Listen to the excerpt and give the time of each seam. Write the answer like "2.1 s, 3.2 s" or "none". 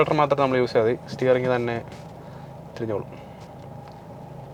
none

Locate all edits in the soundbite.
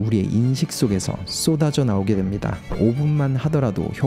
2.6 s

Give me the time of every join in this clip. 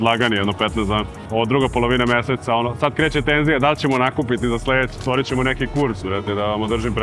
1.2 s, 4.9 s

